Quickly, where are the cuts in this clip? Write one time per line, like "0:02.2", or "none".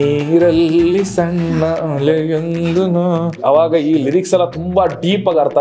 0:03.4